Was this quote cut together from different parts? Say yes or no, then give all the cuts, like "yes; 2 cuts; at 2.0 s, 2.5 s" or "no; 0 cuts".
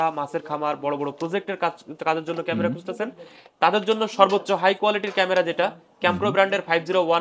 no; 0 cuts